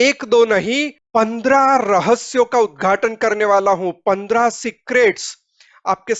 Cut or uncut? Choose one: cut